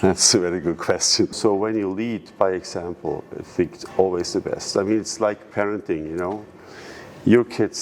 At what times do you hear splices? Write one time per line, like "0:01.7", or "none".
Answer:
0:01.3